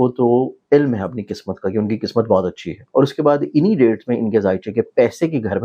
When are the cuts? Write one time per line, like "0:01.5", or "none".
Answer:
0:02.8